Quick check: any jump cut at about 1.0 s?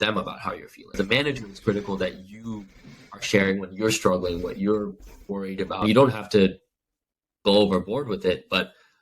yes; 2 cuts; at 1.0 s, 5.8 s

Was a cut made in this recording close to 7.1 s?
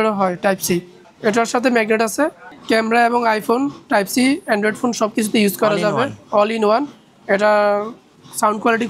no; 1 cut; at 2.5 s

